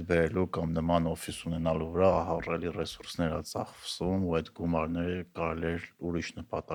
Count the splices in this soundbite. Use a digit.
0